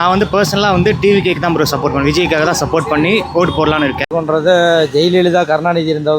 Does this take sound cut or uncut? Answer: cut